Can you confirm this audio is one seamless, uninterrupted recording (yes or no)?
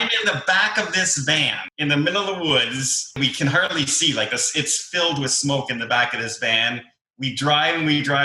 no